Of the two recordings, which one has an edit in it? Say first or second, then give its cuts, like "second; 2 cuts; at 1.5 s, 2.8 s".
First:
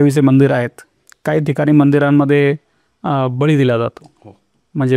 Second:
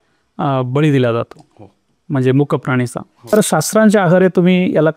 second; 1 cut; at 3.3 s